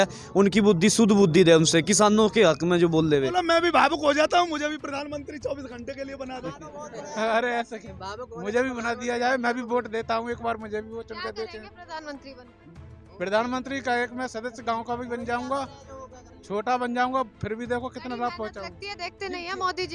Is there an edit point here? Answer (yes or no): yes